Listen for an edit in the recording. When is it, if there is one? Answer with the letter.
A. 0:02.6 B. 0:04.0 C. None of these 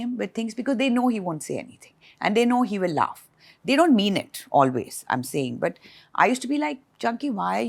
C